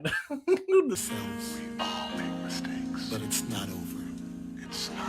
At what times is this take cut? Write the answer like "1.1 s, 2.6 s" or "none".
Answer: 1.0 s